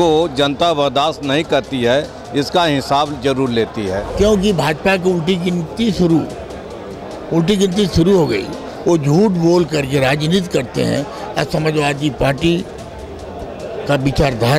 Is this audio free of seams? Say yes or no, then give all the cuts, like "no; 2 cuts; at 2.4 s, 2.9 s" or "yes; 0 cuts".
no; 1 cut; at 4.1 s